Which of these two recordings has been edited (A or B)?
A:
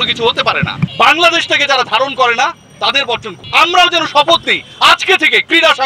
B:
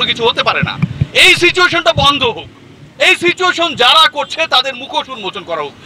A